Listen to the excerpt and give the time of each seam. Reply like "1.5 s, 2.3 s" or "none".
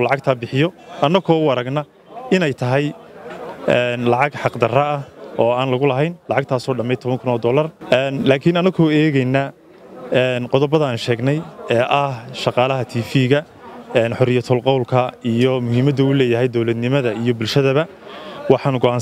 none